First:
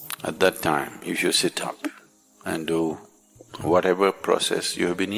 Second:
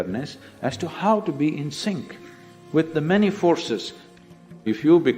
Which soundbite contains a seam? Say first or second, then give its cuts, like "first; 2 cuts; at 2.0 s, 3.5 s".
second; 1 cut; at 4.0 s